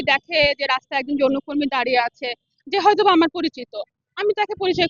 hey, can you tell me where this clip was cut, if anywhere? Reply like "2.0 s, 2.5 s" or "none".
none

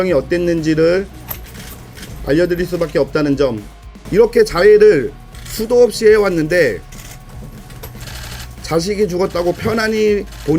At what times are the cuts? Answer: 3.7 s

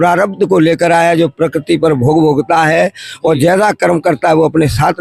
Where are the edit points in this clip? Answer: none

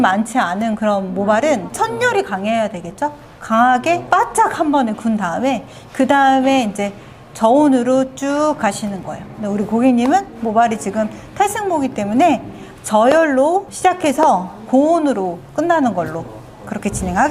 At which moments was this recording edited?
1.7 s, 4.0 s

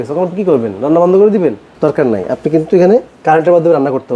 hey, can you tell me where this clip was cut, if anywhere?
1.7 s, 3.1 s

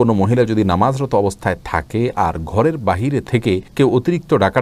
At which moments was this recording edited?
none

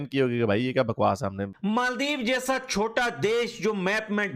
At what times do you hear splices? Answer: 1.5 s

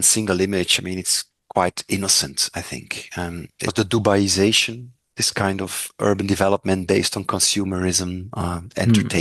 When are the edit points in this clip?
3.7 s

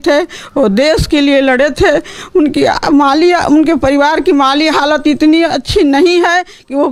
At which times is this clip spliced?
none

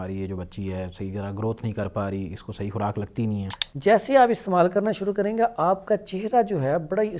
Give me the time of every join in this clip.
3.5 s

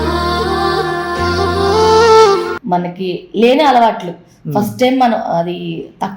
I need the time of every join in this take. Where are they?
2.5 s

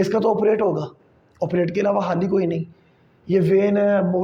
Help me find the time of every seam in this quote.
none

